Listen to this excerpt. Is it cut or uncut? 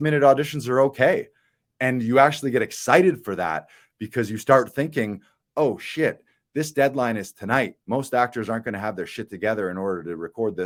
uncut